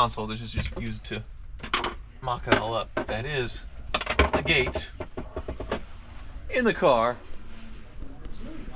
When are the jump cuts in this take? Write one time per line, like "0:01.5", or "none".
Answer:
none